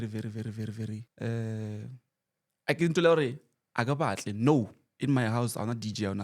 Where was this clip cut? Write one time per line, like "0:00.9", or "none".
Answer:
0:01.1